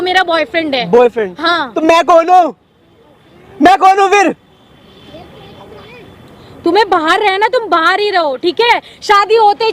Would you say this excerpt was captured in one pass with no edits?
yes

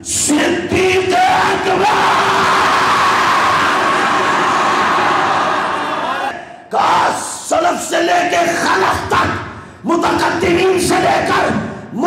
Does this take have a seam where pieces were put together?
yes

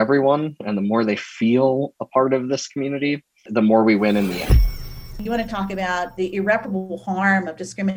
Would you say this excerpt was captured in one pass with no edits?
no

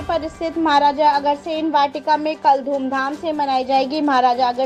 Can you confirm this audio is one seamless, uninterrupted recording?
yes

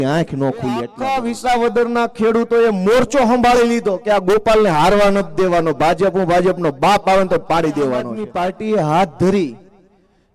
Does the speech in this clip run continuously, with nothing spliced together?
no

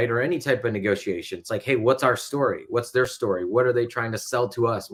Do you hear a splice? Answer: no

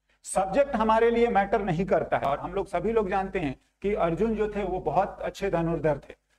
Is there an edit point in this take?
yes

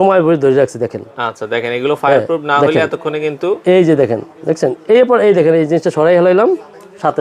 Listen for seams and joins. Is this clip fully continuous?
yes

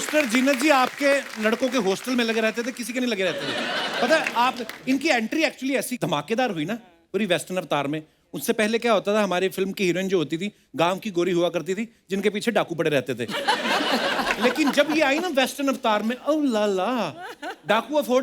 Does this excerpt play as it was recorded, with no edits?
yes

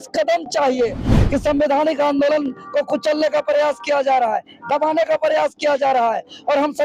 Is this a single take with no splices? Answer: no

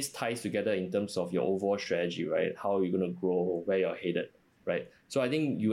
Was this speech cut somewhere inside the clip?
no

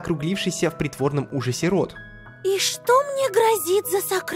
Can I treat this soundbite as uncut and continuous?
yes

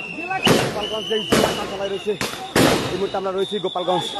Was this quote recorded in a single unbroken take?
yes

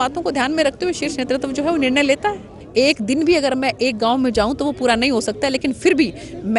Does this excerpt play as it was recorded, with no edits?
no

